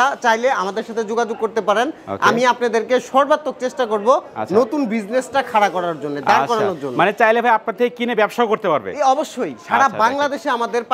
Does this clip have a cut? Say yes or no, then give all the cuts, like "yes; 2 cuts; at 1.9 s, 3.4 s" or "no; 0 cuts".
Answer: no; 0 cuts